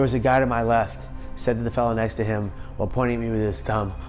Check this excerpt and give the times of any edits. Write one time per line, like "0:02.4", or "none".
none